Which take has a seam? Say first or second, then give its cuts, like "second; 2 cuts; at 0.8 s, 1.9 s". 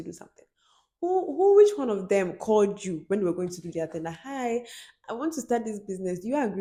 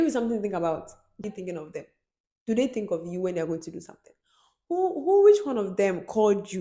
second; 1 cut; at 1.2 s